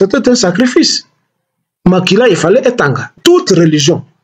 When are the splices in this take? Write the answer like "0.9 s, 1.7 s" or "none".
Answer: 3.1 s